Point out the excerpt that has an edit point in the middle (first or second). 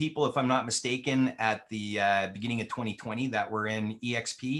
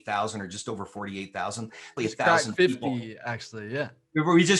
second